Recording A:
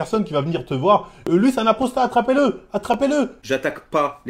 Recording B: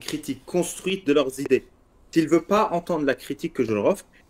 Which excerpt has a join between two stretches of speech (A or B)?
A